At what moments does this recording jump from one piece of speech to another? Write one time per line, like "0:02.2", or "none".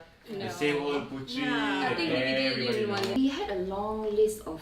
0:03.1